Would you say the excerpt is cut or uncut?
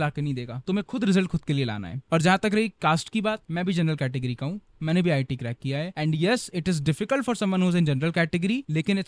uncut